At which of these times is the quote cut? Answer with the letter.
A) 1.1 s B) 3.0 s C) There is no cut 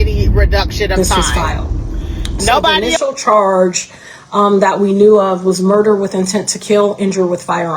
B